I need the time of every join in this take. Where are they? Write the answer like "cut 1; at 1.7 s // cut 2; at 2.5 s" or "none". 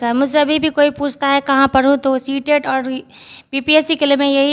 none